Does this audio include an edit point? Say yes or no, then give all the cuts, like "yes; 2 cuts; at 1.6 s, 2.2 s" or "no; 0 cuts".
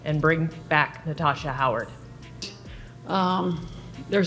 yes; 1 cut; at 2.4 s